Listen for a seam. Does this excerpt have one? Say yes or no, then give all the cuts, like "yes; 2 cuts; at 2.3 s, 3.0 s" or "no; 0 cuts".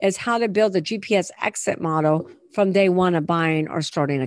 no; 0 cuts